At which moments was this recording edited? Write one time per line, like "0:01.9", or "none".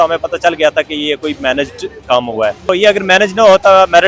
0:02.7

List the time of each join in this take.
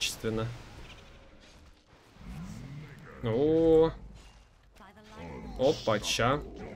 none

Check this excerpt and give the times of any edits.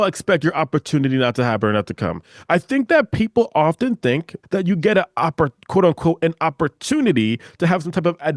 0:04.3

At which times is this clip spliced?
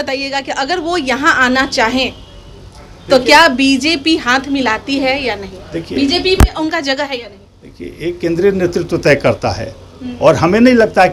none

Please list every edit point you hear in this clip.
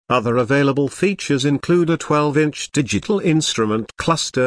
0:00.9

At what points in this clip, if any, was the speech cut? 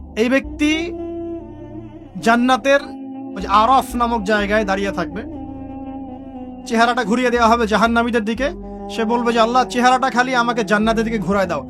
0:05.0
0:06.7

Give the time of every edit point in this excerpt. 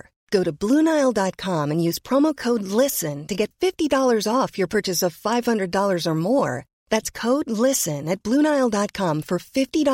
none

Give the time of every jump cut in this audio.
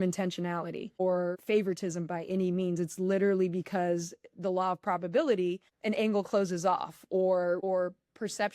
0:01.2
0:07.6

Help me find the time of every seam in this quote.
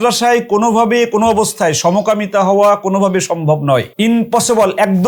none

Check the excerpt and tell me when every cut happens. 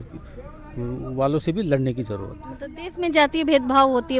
none

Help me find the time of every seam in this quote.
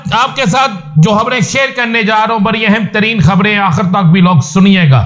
none

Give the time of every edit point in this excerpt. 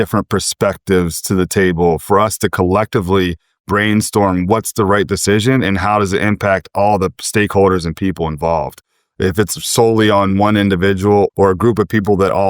0:11.3

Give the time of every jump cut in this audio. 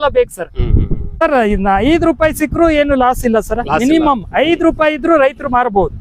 0:01.2

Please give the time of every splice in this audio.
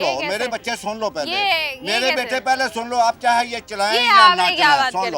none

